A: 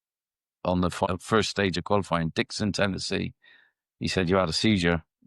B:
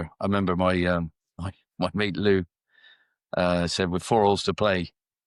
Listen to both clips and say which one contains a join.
A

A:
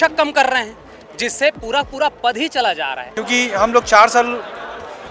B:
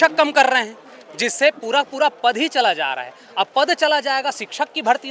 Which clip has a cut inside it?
A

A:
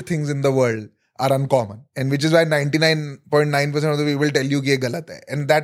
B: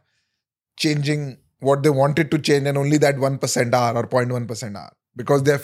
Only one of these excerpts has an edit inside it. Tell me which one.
A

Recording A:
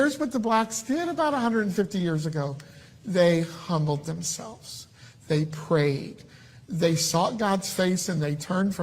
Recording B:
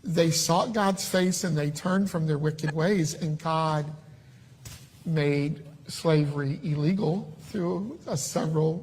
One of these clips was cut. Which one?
B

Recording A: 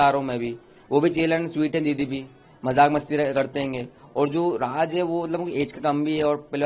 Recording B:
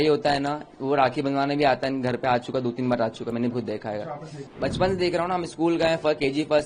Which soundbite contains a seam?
B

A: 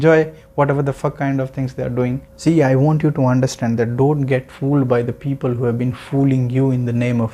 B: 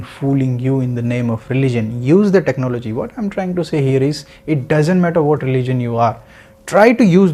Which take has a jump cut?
A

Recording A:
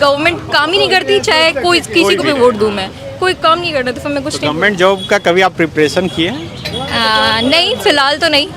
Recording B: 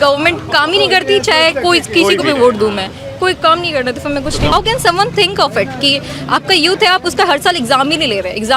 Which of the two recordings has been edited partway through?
B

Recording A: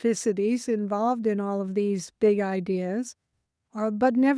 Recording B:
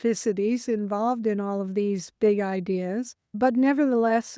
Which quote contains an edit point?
B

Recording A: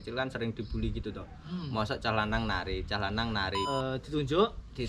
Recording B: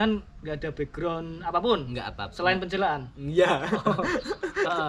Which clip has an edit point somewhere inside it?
A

